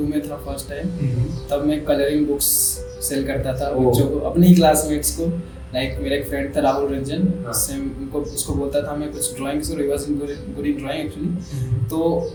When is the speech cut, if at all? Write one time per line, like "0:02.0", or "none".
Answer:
none